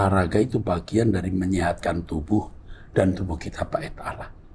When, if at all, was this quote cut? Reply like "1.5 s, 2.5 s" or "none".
none